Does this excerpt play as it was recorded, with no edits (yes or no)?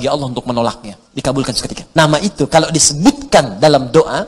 no